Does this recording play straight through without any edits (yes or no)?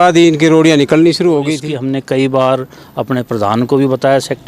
no